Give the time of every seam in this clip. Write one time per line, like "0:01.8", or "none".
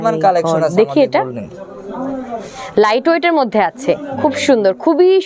none